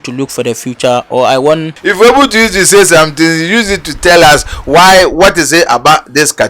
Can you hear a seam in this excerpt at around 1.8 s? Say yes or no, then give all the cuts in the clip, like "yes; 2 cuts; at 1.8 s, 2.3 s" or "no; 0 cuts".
yes; 1 cut; at 1.8 s